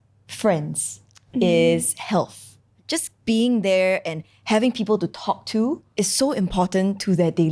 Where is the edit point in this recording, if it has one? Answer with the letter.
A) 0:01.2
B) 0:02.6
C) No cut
B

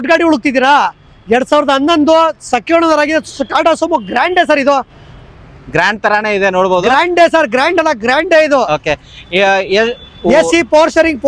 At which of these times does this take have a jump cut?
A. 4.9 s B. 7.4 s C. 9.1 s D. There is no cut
D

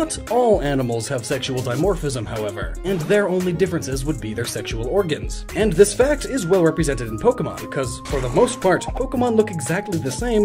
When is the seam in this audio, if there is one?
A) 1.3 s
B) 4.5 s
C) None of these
A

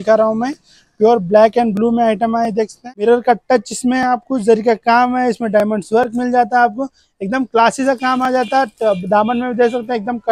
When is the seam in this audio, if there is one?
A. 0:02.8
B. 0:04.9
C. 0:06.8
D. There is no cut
A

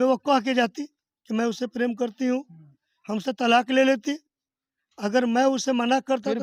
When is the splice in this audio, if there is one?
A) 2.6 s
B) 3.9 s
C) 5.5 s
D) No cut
D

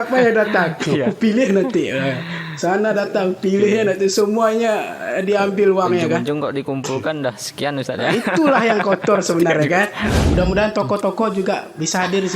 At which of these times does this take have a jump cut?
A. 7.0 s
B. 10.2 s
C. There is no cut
B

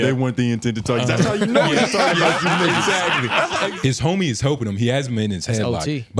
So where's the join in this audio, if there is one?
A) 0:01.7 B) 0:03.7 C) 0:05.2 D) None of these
B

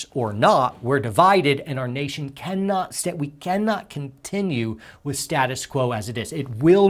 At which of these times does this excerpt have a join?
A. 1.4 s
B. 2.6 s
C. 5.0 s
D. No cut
D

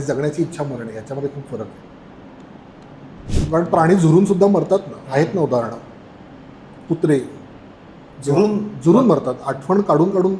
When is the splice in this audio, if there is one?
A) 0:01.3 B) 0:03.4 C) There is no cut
B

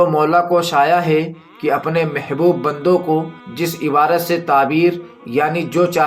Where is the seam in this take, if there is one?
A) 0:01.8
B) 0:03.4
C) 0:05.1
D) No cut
D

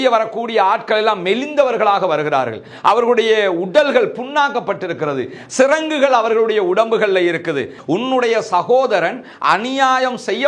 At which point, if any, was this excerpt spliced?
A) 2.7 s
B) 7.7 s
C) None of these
B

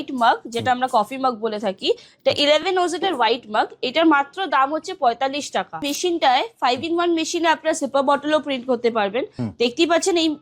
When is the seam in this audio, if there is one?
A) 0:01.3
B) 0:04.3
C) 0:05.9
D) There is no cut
C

